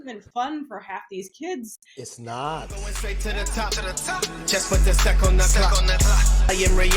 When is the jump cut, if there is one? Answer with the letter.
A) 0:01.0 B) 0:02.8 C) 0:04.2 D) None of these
B